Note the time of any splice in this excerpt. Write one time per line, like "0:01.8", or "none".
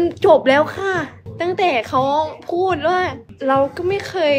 0:03.3